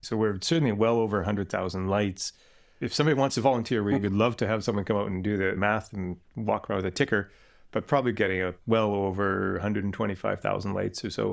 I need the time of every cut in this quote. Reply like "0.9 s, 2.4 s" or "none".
none